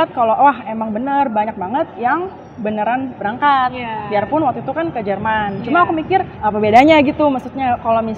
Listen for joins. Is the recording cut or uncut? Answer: cut